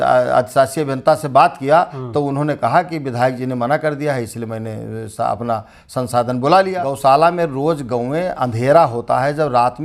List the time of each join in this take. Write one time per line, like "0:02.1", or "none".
0:06.8